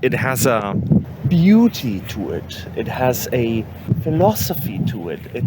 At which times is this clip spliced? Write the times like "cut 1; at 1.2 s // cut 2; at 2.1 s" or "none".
cut 1; at 1.0 s // cut 2; at 3.8 s